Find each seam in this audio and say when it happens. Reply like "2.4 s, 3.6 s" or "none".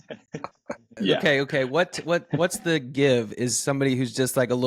0.9 s